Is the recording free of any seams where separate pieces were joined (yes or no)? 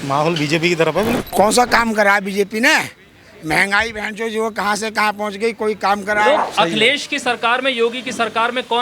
no